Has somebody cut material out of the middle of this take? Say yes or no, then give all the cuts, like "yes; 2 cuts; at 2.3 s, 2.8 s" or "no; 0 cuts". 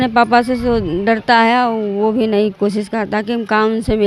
no; 0 cuts